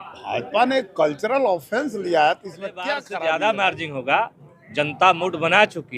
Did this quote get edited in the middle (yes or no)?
yes